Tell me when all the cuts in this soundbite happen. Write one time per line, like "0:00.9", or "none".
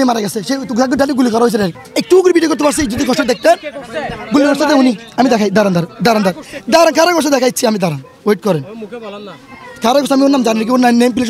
0:01.8